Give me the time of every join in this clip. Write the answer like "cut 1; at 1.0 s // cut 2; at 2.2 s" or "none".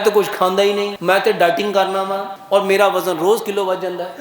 cut 1; at 0.9 s // cut 2; at 2.3 s